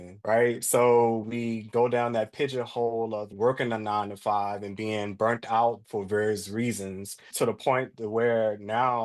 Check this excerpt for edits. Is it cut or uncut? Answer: uncut